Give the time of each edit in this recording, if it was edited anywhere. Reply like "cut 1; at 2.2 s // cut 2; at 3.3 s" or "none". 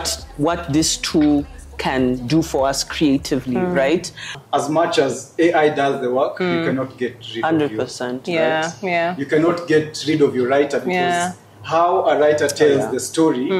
cut 1; at 4.4 s